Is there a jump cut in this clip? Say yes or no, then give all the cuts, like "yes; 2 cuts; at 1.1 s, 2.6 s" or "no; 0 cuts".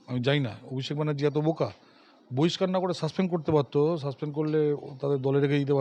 no; 0 cuts